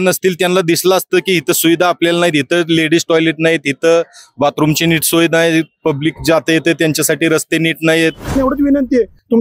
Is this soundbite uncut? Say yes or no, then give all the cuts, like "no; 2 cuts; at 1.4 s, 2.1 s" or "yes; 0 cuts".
no; 1 cut; at 8.4 s